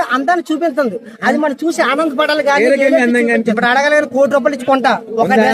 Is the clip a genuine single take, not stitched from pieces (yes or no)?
no